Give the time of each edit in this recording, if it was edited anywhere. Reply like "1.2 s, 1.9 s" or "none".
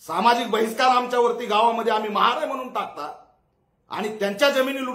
none